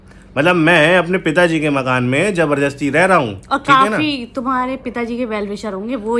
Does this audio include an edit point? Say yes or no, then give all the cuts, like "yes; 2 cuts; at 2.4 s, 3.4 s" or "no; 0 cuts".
no; 0 cuts